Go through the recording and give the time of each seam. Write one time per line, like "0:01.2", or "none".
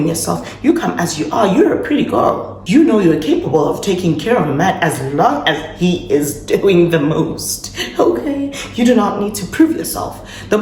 none